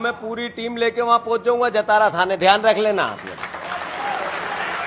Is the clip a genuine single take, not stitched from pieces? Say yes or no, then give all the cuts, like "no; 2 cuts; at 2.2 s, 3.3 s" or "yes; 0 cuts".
yes; 0 cuts